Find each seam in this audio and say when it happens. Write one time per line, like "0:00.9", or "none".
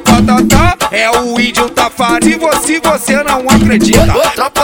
0:02.0